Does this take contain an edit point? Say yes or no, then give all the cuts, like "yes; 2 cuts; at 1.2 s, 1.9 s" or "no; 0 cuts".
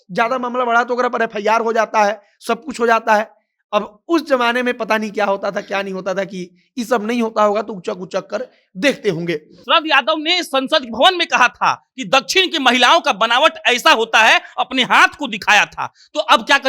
yes; 1 cut; at 9.5 s